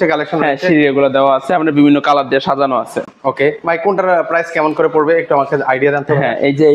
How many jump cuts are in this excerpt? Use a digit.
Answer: 0